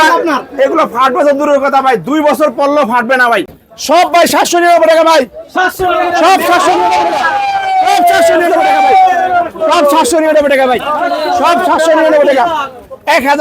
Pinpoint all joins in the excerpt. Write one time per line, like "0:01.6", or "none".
0:03.6